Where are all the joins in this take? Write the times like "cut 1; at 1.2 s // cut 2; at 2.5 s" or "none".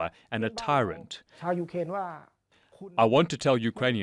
cut 1; at 1.4 s